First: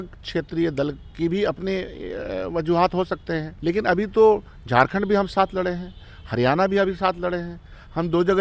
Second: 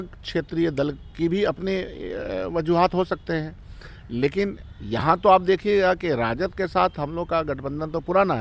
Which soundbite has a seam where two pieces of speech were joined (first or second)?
first